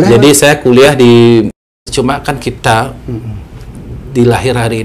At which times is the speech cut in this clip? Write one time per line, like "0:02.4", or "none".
0:01.8